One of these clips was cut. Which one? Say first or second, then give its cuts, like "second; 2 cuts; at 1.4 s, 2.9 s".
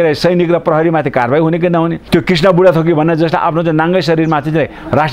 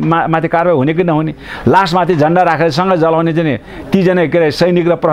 first; 1 cut; at 2.0 s